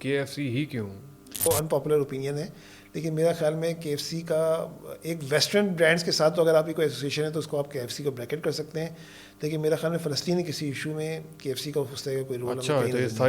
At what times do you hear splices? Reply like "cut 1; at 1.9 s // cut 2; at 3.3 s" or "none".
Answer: cut 1; at 1.4 s